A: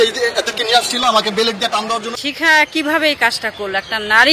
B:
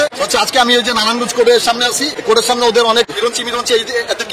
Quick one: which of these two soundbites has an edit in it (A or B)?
A